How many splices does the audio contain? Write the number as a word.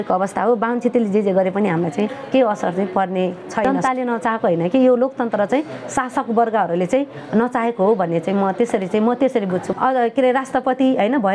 two